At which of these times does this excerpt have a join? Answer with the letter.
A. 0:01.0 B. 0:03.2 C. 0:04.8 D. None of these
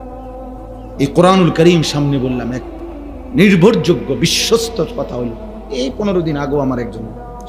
A